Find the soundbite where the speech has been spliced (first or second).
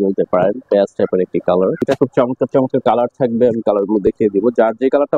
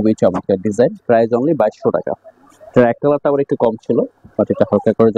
first